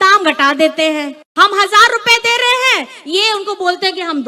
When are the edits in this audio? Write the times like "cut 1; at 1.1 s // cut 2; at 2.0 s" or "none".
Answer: cut 1; at 1.2 s